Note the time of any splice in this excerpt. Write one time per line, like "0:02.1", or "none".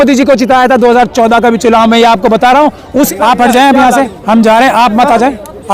0:03.1